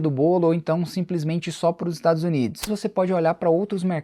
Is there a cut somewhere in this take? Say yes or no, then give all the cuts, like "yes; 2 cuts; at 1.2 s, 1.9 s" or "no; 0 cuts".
yes; 1 cut; at 2.7 s